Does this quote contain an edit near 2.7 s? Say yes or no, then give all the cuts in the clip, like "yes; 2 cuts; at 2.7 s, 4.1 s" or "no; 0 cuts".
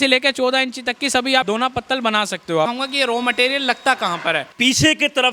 yes; 3 cuts; at 1.4 s, 2.7 s, 4.5 s